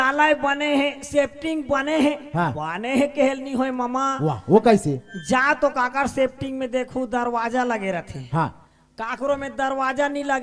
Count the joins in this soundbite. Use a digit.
0